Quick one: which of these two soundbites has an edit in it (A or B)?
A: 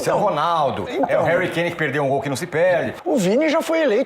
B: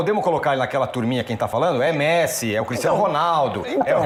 A